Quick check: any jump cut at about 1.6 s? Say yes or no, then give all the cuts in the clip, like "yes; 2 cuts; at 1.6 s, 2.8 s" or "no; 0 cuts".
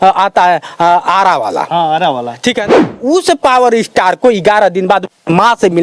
no; 1 cut; at 3.0 s